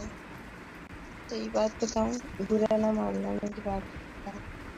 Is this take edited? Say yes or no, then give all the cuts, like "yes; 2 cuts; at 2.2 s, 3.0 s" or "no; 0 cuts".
no; 0 cuts